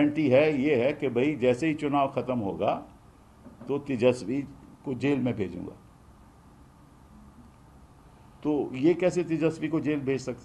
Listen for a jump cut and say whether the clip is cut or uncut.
uncut